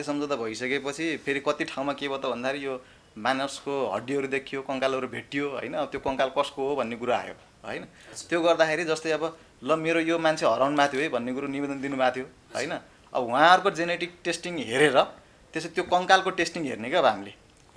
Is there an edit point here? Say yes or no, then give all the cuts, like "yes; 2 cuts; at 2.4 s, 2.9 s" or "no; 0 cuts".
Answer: no; 0 cuts